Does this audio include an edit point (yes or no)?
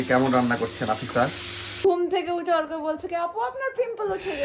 yes